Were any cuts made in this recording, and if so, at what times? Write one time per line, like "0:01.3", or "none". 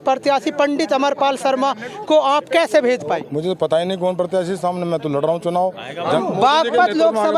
0:03.2
0:06.2